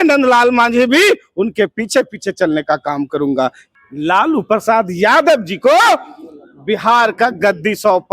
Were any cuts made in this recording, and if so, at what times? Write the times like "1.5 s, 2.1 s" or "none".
3.6 s